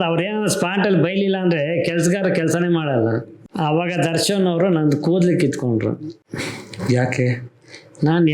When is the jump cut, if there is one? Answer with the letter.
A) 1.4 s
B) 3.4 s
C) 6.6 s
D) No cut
B